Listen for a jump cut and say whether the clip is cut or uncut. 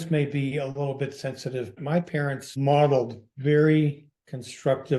cut